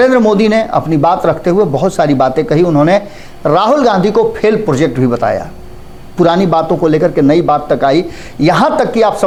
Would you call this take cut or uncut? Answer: uncut